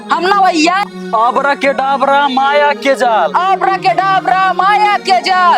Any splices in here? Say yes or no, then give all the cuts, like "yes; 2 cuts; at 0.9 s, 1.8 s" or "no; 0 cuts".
yes; 1 cut; at 0.9 s